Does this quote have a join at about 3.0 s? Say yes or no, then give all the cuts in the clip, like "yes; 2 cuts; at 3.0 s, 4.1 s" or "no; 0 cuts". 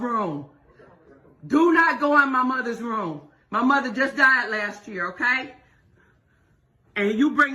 no; 0 cuts